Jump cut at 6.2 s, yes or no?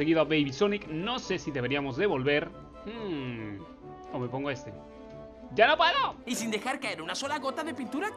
yes